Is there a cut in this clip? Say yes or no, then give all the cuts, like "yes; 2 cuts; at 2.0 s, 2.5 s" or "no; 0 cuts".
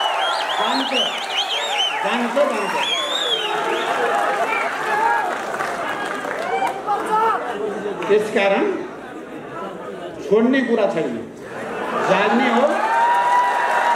no; 0 cuts